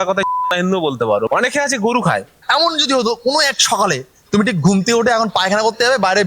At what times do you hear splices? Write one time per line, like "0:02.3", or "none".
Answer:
0:01.3
0:02.4